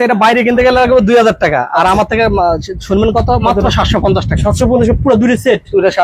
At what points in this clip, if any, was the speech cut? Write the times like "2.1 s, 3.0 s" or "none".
none